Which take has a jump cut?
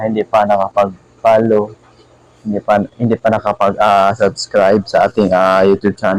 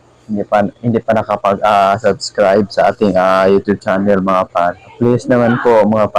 second; 1 cut; at 4.9 s

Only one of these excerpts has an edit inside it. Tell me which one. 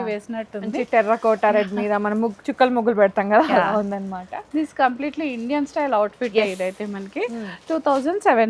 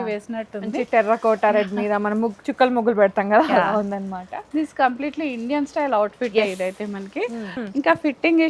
second; 1 cut; at 7.5 s

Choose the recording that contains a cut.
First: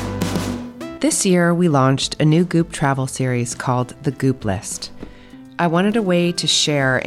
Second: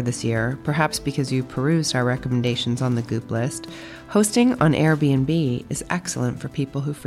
first; 1 cut; at 0.9 s

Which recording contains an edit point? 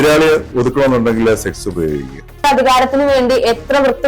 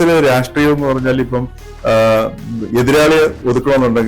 first; 1 cut; at 2.4 s

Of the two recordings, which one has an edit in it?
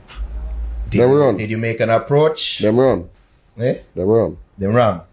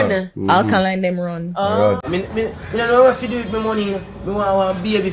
second; 1 cut; at 2.0 s

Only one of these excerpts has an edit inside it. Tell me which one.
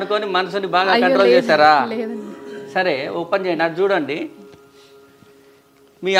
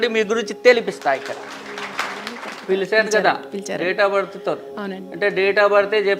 second; 1 cut; at 1.9 s

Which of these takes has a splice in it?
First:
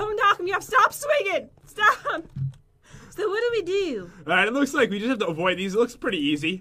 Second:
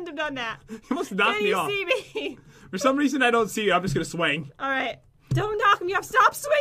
first; 1 cut; at 4.0 s

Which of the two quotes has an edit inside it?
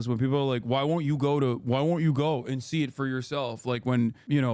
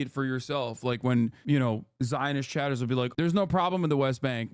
second; 1 cut; at 3.1 s

